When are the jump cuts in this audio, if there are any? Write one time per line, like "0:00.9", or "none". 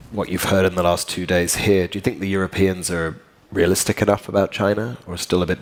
none